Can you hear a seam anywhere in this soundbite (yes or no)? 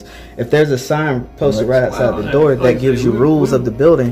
no